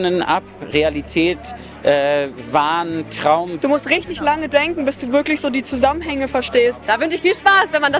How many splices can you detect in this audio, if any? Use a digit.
2